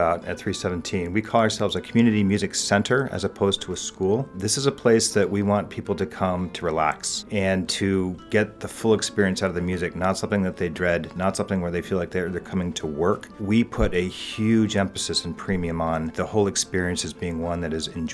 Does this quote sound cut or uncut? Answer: cut